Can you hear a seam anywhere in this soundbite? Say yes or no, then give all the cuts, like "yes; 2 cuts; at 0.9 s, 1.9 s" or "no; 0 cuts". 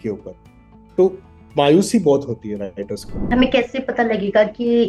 yes; 1 cut; at 3.3 s